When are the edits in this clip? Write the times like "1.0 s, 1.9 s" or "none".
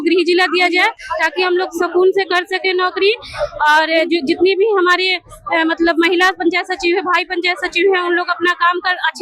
none